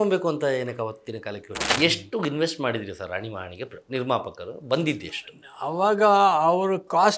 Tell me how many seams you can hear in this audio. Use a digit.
1